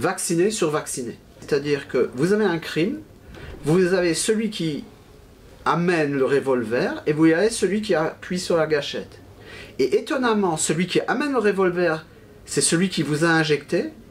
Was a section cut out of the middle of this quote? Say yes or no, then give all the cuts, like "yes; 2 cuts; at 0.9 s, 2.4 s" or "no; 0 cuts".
yes; 1 cut; at 1.4 s